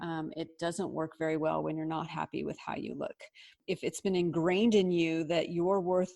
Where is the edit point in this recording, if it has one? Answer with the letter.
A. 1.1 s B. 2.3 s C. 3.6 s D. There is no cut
C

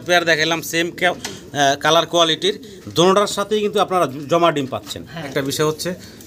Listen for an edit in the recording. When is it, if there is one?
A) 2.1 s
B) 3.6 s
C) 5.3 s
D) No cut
C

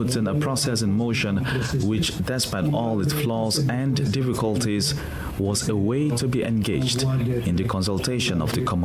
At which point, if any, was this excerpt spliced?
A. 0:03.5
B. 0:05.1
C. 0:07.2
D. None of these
D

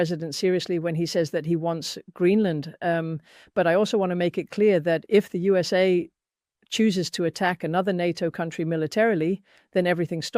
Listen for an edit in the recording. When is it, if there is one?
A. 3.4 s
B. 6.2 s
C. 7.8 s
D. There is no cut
D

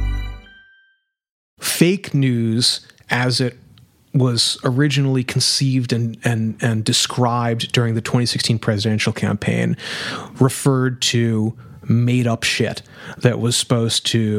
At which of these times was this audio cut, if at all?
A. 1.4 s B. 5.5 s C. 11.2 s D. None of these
A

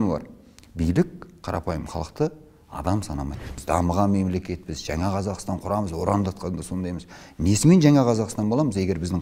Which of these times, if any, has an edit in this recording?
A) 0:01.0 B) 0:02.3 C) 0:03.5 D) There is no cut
C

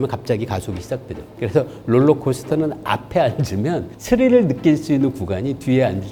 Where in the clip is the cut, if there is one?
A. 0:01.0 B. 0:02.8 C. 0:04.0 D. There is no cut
D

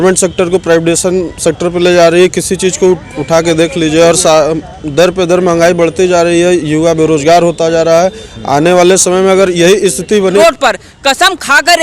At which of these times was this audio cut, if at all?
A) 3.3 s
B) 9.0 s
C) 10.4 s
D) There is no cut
C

